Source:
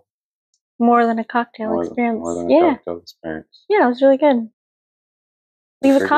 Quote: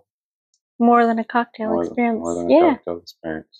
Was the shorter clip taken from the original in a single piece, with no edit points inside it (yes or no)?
yes